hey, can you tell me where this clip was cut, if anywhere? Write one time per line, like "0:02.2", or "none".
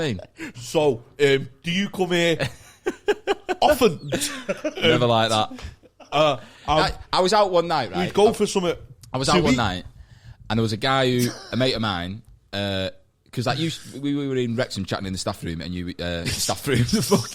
none